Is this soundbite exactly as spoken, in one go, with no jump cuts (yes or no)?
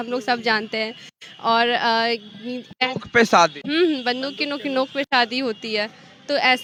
yes